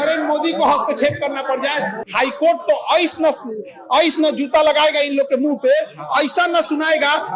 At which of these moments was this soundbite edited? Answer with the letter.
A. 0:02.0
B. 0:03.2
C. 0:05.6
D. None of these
A